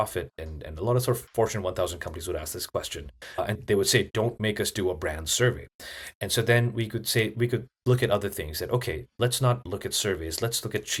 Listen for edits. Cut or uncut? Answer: uncut